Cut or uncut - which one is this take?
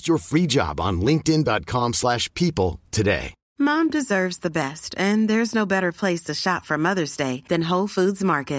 cut